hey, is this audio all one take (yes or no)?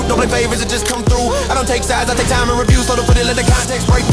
yes